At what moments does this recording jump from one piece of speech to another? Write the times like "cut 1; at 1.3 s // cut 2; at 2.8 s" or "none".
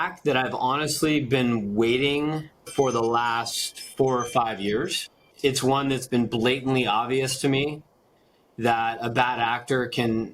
cut 1; at 5.3 s

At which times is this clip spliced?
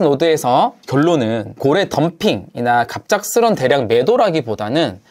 cut 1; at 0.8 s // cut 2; at 1.5 s

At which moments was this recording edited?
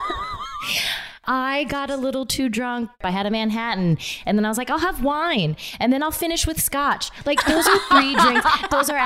cut 1; at 1.2 s // cut 2; at 2.9 s

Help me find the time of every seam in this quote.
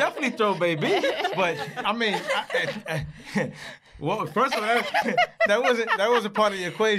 cut 1; at 5.1 s

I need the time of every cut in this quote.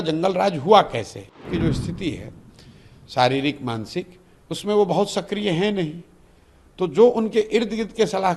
cut 1; at 1.5 s

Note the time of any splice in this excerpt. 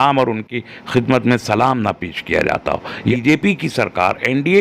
cut 1; at 3.1 s

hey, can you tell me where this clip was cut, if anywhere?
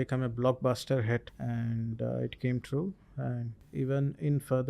cut 1; at 1.4 s // cut 2; at 3.6 s

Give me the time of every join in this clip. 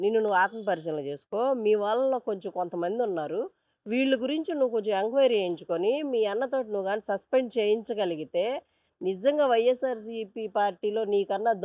none

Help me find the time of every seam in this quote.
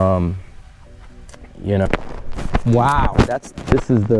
cut 1; at 1.9 s

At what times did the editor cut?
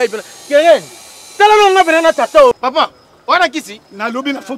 none

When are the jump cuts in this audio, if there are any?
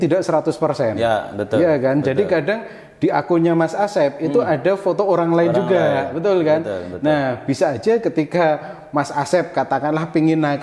none

